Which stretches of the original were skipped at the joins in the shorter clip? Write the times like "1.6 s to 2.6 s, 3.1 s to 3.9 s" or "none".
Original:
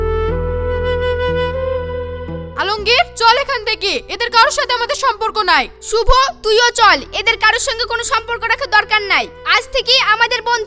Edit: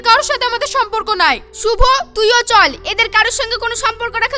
none